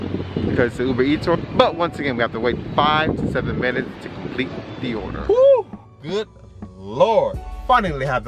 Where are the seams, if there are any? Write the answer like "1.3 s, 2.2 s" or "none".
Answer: none